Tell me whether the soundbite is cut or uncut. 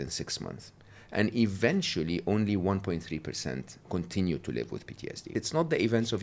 cut